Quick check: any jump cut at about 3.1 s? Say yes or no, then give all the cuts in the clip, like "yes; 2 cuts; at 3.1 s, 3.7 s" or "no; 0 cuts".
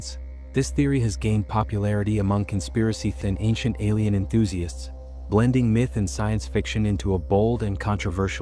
yes; 1 cut; at 3.1 s